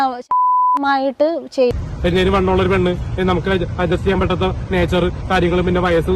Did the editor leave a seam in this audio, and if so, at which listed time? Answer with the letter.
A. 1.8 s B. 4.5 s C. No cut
A